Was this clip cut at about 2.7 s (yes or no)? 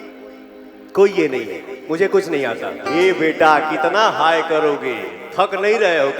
yes